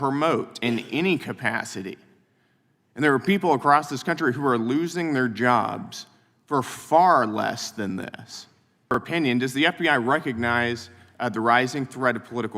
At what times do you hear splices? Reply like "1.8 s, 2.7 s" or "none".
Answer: 8.9 s